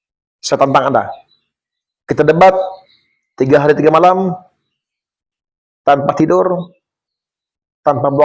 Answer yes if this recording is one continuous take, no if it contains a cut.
yes